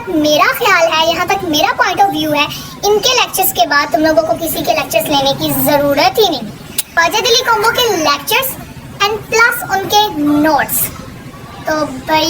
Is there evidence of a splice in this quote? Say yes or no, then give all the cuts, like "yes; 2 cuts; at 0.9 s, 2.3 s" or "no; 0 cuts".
yes; 1 cut; at 6.9 s